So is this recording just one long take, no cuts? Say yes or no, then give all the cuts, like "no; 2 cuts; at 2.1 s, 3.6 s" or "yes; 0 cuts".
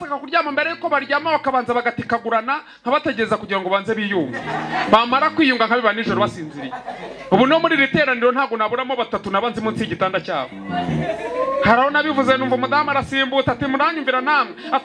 yes; 0 cuts